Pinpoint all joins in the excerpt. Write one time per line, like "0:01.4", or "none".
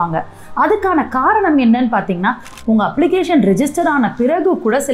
0:02.5

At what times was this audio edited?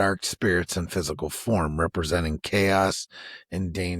none

